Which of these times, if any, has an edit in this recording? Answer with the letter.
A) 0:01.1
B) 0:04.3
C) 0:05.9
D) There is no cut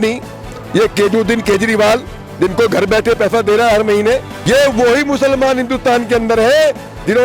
B